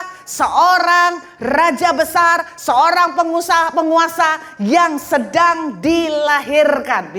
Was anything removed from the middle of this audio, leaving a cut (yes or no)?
no